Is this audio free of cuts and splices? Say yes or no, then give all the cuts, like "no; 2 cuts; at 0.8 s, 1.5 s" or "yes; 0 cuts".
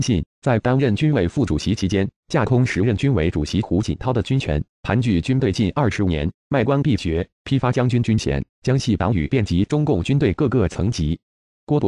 yes; 0 cuts